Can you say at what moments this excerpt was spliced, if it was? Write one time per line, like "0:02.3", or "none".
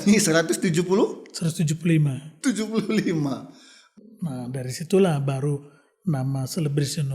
0:03.9